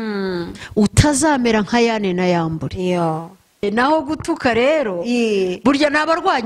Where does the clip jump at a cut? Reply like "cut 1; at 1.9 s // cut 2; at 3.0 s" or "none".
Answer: cut 1; at 3.6 s